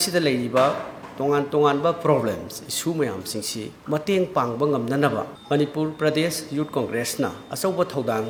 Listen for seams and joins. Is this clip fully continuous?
yes; 0 cuts

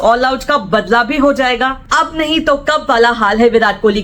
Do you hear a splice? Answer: yes; 1 cut; at 1.8 s

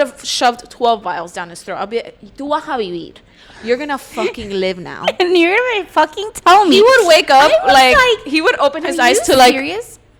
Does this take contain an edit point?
no; 0 cuts

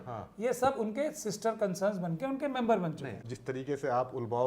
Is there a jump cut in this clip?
yes; 1 cut; at 3.2 s

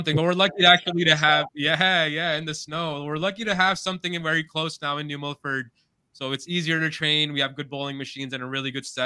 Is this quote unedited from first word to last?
yes; 0 cuts

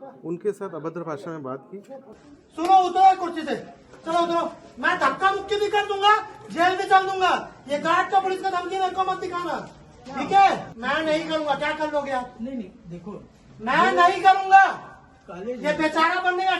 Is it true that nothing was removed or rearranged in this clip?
no; 2 cuts; at 2.1 s, 10.7 s

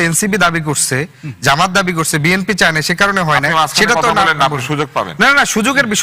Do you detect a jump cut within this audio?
no; 0 cuts

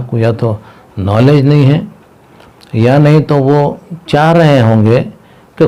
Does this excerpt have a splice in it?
no; 0 cuts

